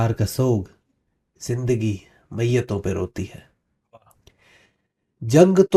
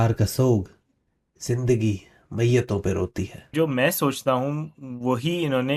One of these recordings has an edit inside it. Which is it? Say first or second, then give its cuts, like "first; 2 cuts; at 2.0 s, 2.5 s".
second; 1 cut; at 3.5 s